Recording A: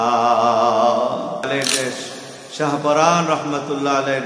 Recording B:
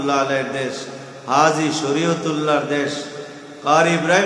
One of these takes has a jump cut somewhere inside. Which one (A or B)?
A